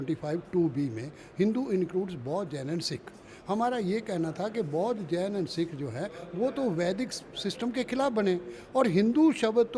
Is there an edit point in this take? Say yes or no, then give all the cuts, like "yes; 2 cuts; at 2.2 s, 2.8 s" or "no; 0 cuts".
no; 0 cuts